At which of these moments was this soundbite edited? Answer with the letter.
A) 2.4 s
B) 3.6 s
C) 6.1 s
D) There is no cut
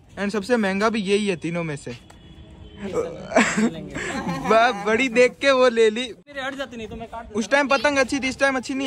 C